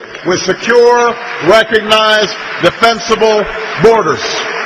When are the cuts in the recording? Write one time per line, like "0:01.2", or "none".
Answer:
none